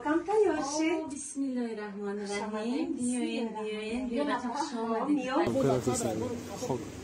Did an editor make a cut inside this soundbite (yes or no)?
yes